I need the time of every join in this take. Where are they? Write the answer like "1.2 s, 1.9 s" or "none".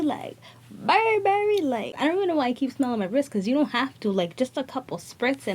1.9 s